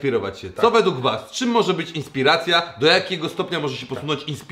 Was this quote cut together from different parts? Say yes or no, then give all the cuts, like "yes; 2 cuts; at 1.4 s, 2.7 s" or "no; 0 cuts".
no; 0 cuts